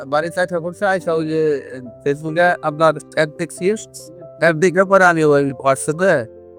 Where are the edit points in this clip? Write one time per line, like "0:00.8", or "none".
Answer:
none